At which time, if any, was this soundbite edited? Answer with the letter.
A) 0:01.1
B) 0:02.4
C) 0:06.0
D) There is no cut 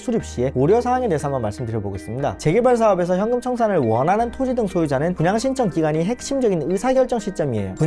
B